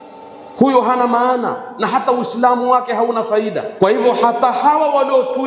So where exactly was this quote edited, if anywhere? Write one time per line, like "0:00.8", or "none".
0:03.7